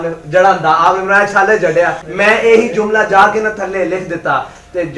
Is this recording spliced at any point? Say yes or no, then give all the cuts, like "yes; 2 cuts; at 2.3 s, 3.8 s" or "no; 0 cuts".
yes; 1 cut; at 2.0 s